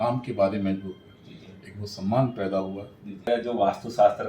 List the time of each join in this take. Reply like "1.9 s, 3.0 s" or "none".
3.3 s